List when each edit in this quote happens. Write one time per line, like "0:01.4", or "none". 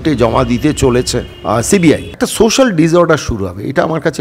0:01.3
0:02.1